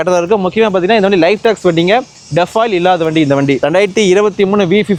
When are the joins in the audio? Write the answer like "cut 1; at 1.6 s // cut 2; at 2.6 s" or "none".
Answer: none